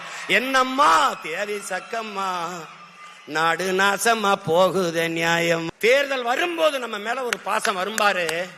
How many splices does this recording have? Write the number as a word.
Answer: one